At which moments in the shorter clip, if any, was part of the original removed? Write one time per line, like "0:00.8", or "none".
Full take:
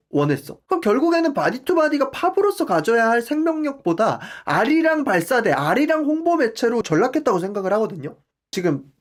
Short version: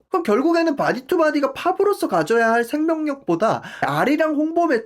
0:03.9

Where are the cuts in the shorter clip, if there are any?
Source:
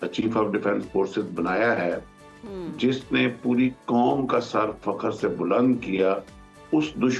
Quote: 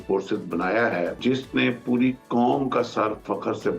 0:01.2

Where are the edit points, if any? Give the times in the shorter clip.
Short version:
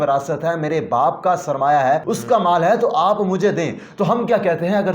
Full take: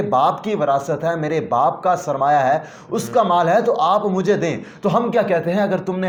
0:02.1

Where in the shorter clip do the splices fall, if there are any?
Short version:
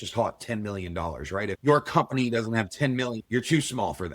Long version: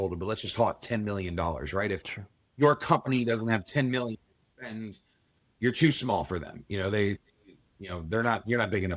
0:01.6
0:03.2

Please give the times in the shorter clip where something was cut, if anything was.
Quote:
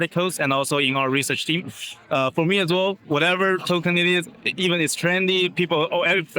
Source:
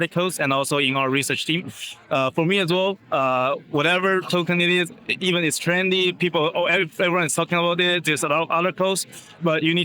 0:03.0

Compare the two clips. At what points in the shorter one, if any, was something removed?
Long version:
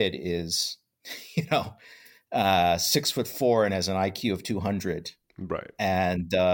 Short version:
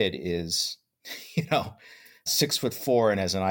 0:02.3

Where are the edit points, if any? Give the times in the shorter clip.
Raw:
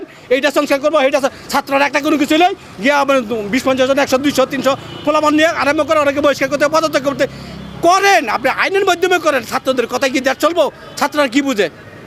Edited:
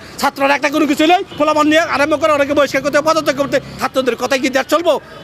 0:01.3
0:03.8

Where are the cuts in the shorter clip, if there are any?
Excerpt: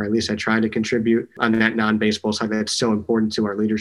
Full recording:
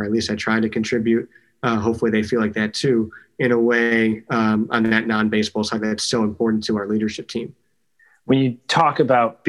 0:01.4

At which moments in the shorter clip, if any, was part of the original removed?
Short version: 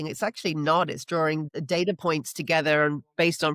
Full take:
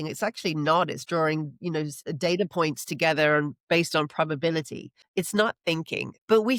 0:01.5

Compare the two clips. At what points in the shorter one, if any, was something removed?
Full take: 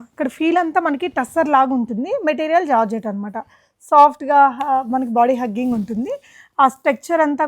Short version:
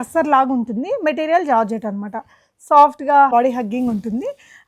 0:03.3

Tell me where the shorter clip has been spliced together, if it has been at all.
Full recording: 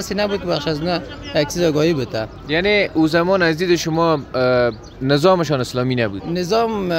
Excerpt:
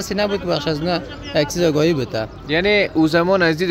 none

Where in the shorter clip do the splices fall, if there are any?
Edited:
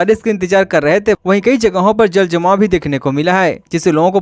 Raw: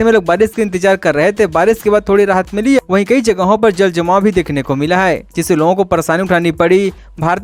0:01.2

